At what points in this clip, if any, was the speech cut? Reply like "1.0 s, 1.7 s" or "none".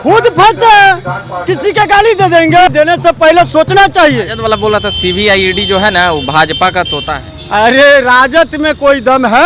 2.7 s, 4.3 s